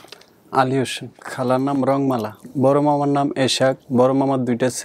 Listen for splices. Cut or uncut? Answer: cut